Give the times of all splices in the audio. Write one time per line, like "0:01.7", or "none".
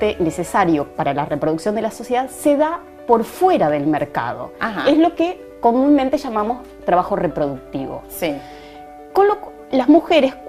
none